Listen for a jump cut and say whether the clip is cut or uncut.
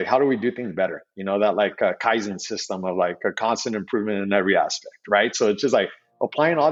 uncut